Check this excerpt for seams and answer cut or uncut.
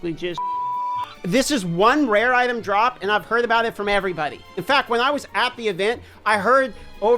cut